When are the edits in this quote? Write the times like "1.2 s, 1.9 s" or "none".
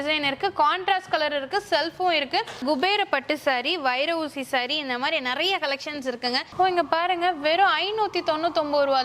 2.6 s, 6.4 s